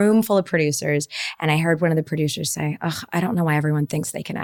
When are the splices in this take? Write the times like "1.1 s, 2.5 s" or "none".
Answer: none

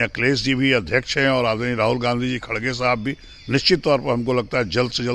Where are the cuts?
none

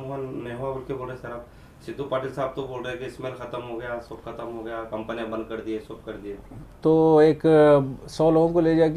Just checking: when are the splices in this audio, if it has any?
none

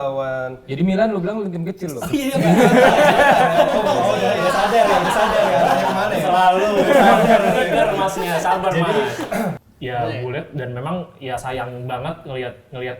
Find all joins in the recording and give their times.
9.6 s

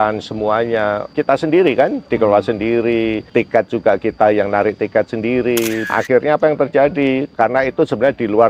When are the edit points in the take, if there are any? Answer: 1.1 s, 3.2 s, 5.9 s, 7.3 s

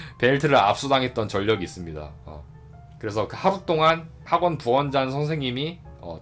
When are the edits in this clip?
none

